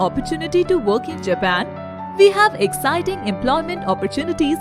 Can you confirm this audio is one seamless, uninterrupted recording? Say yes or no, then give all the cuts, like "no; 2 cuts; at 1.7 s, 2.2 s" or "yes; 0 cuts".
yes; 0 cuts